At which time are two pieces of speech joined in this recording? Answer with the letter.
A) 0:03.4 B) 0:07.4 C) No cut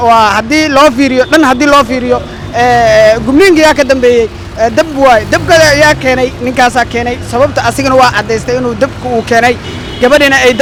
C